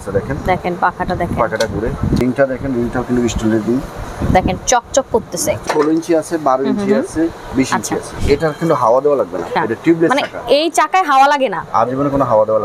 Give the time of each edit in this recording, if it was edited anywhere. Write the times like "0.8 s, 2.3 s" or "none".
2.2 s, 4.0 s, 5.7 s, 8.1 s, 9.5 s